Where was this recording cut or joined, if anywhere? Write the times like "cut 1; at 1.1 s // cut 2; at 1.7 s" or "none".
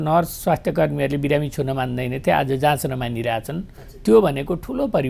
none